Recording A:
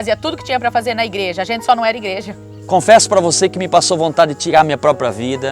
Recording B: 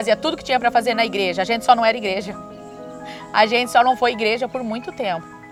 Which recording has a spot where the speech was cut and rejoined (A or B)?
A